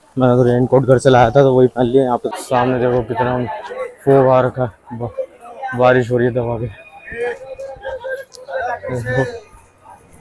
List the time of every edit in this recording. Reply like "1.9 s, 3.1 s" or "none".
2.2 s